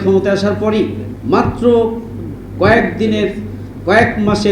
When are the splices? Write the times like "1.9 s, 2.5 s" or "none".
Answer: 1.1 s

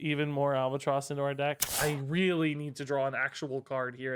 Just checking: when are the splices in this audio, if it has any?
1.7 s

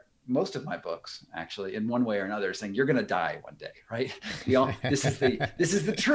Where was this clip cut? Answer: none

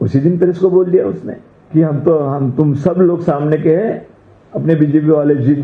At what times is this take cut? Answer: none

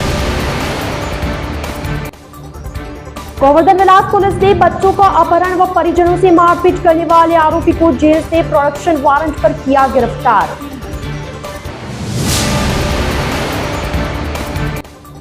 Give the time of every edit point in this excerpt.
2.3 s

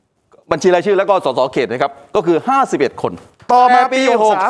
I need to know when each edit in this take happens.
3.3 s

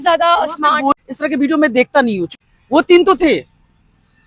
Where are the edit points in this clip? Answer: 0.9 s, 2.4 s

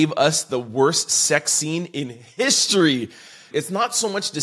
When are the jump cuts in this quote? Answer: 3.5 s

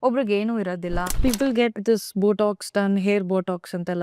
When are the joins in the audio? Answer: 1.2 s

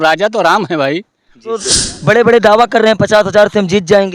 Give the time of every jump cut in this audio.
1.8 s

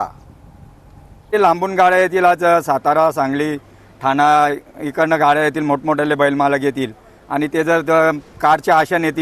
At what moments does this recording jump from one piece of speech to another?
1.3 s

